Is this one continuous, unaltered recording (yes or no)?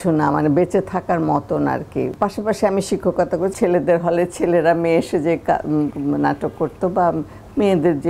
no